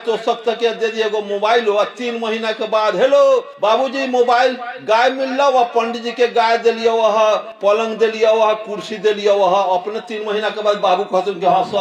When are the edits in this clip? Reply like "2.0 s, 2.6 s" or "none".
none